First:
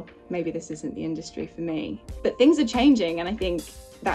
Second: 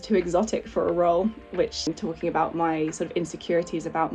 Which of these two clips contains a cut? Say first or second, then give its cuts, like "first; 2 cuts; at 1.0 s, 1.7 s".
second; 1 cut; at 1.9 s